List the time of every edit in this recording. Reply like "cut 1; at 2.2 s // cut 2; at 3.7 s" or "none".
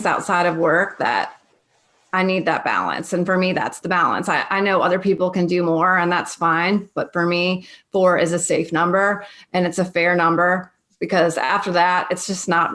none